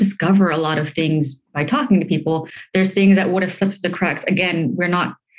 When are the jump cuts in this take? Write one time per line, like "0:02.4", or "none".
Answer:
0:02.6
0:03.5